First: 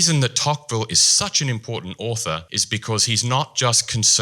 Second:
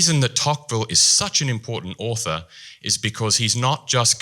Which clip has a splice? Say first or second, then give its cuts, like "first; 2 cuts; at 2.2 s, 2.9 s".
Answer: first; 1 cut; at 2.5 s